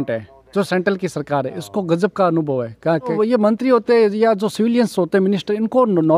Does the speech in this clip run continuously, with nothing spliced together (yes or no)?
no